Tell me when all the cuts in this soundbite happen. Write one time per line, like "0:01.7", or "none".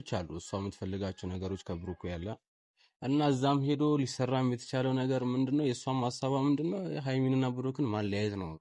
none